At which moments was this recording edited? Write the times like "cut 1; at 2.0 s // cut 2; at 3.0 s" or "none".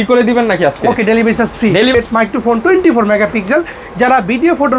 cut 1; at 1.9 s